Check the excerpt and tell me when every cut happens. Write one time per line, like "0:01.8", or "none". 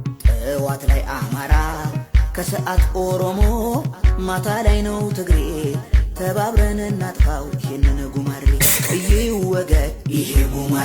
none